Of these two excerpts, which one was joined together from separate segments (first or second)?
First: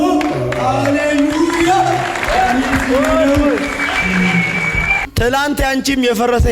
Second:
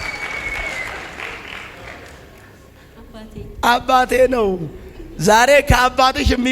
first